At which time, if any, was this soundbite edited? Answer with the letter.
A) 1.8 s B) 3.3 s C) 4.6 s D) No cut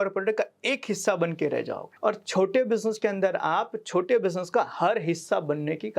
A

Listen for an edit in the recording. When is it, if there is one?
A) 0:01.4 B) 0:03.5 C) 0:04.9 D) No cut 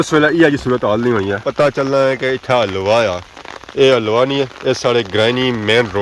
A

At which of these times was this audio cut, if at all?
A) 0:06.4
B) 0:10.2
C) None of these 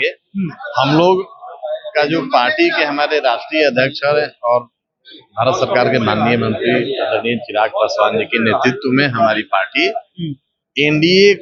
C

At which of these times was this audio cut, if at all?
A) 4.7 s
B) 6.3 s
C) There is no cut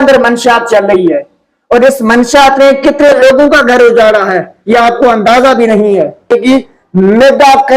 B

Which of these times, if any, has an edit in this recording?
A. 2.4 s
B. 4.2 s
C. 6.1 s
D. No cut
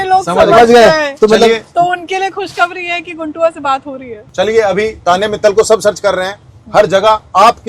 B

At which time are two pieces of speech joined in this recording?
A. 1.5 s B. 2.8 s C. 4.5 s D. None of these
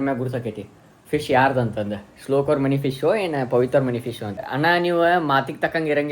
C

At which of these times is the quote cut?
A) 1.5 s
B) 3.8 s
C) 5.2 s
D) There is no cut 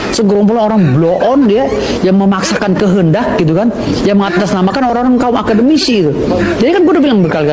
D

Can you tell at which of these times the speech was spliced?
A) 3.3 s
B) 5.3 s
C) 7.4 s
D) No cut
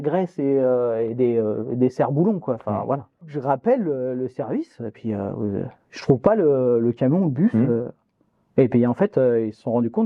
A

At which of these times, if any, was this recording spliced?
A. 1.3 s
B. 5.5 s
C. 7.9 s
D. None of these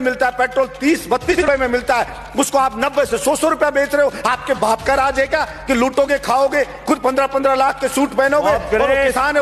A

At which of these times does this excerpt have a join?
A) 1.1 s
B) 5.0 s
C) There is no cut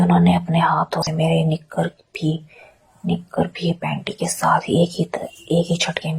A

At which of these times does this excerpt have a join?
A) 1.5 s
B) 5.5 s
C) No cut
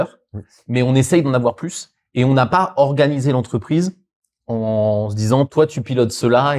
B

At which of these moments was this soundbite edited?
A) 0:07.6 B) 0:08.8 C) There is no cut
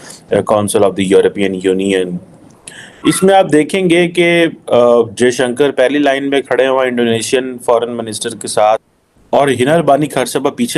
B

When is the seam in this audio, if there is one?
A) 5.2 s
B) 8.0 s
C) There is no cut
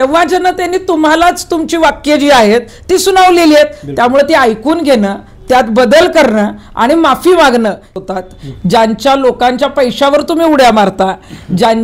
B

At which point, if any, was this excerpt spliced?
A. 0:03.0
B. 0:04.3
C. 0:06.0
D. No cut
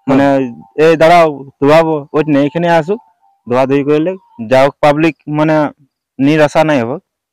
B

